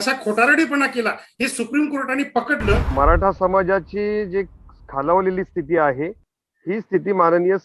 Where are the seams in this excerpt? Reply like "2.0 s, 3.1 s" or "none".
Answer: 2.9 s